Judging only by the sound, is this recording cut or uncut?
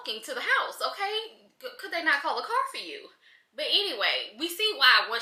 uncut